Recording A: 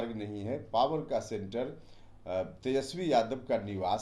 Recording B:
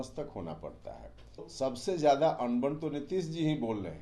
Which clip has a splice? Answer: B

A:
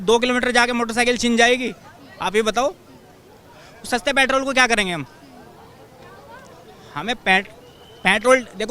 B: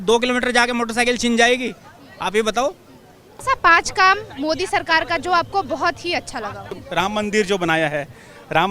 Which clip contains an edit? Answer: B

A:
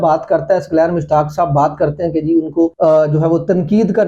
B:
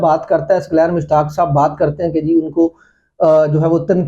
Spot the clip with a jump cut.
A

